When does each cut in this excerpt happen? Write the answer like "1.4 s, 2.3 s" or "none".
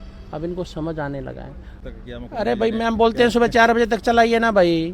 1.8 s